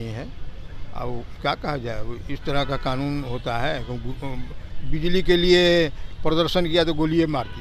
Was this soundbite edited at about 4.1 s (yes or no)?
no